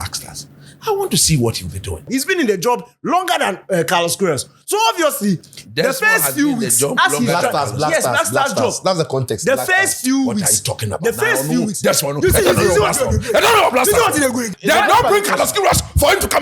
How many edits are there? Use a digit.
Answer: 2